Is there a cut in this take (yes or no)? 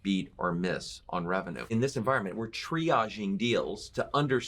yes